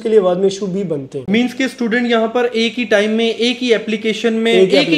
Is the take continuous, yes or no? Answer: no